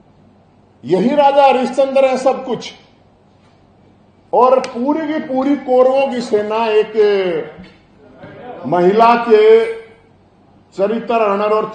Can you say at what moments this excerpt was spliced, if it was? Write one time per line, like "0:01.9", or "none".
none